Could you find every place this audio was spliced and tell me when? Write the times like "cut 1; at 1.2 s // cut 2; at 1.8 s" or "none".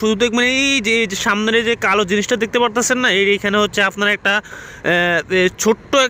none

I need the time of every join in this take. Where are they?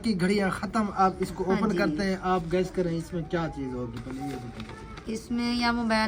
none

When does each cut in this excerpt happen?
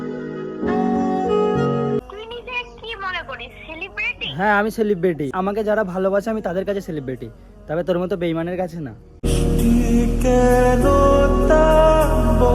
cut 1; at 2.0 s // cut 2; at 5.3 s

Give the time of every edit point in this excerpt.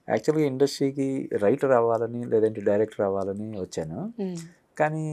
none

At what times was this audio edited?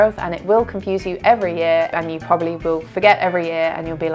cut 1; at 1.9 s

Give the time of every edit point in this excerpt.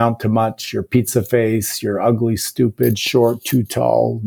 none

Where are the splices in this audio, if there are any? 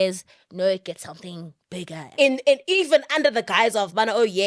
cut 1; at 2.0 s

